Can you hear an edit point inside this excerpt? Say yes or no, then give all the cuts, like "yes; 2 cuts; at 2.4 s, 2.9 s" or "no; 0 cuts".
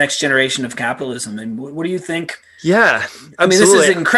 yes; 1 cut; at 2.4 s